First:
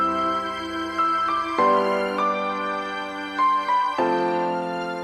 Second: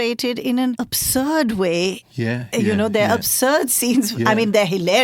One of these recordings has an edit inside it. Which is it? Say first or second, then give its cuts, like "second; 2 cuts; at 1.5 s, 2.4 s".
second; 1 cut; at 0.9 s